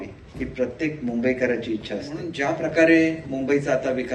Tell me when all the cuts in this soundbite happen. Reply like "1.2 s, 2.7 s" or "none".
2.2 s